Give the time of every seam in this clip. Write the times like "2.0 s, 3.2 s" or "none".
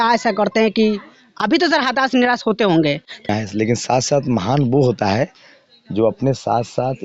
3.3 s